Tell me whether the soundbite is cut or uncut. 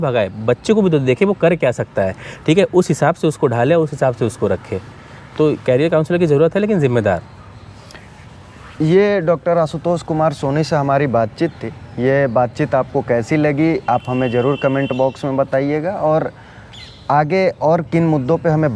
uncut